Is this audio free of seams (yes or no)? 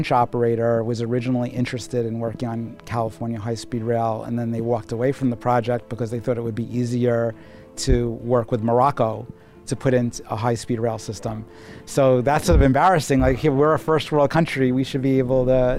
yes